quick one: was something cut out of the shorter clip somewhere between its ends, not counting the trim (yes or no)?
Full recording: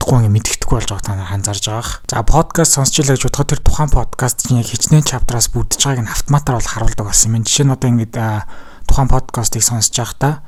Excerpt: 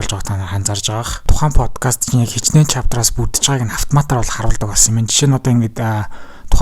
yes